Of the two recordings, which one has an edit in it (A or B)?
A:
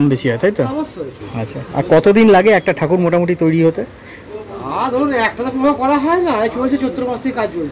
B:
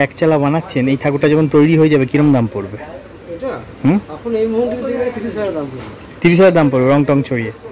A